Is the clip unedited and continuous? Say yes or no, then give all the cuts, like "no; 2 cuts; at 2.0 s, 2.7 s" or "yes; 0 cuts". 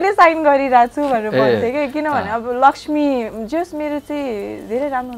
yes; 0 cuts